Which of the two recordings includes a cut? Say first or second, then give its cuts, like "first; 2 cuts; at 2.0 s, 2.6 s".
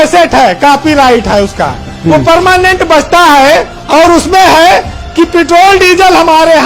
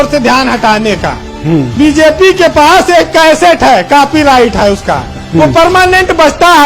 second; 1 cut; at 1.7 s